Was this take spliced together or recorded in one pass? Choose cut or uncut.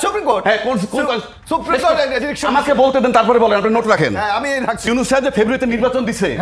cut